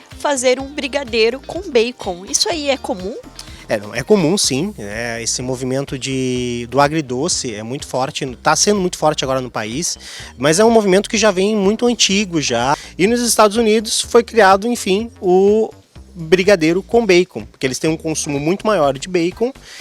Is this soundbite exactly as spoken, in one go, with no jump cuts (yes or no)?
yes